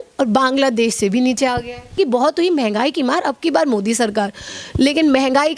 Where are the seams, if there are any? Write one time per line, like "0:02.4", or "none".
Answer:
0:02.0